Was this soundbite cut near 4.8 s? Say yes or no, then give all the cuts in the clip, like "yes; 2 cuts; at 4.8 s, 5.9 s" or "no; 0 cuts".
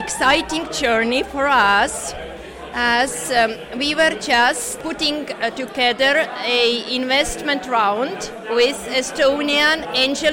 yes; 1 cut; at 4.8 s